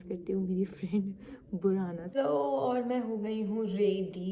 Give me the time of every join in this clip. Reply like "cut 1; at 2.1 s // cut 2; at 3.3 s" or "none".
cut 1; at 2.3 s